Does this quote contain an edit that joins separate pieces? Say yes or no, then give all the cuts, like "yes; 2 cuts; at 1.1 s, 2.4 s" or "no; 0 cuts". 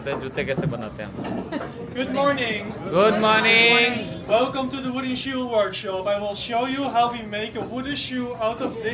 no; 0 cuts